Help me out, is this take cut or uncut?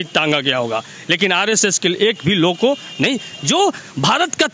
uncut